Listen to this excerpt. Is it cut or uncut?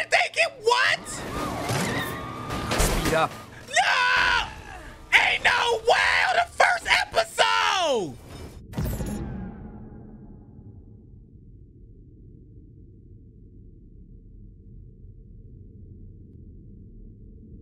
uncut